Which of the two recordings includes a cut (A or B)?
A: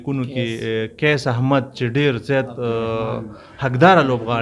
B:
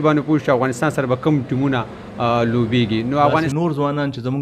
B